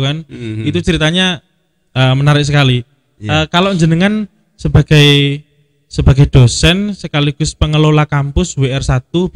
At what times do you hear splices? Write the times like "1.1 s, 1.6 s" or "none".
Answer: none